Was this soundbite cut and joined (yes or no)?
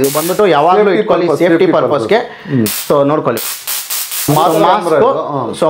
yes